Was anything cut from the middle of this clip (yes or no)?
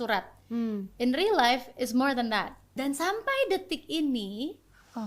yes